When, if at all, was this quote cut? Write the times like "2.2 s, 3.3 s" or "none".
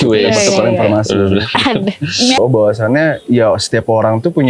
2.4 s